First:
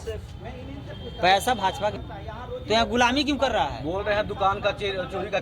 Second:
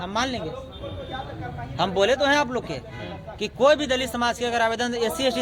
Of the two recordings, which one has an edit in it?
first; 1 cut; at 2.0 s

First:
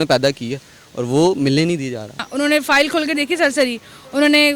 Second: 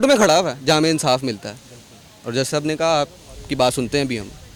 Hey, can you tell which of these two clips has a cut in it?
first; 1 cut; at 2.3 s

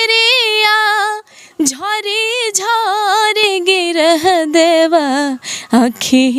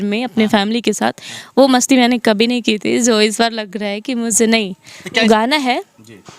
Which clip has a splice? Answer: second; 1 cut; at 5.2 s

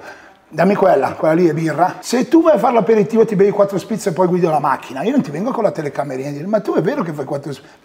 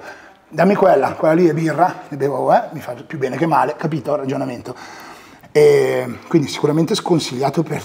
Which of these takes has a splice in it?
first; 1 cut; at 2.0 s

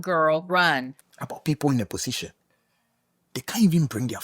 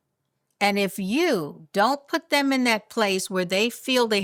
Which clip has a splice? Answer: first; 1 cut; at 0.9 s

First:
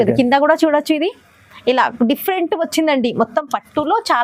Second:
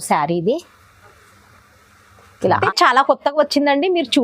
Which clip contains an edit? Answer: second; 1 cut; at 2.6 s

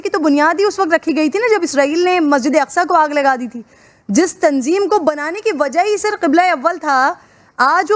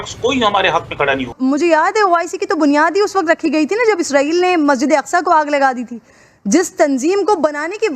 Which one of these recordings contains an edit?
second; 1 cut; at 1.3 s

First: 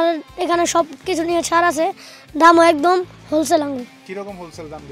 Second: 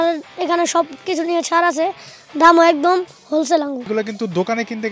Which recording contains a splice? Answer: second; 1 cut; at 3.9 s

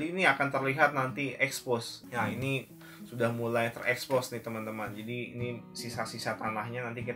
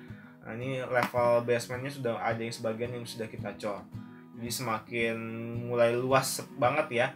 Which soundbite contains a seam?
first; 1 cut; at 2.0 s

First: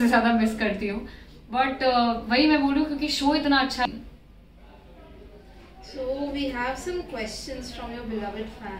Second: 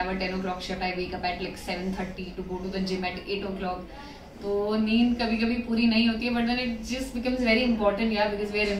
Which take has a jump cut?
first; 1 cut; at 3.9 s

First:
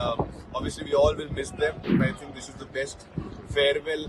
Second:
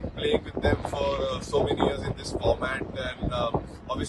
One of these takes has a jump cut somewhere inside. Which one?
first; 1 cut; at 1.9 s

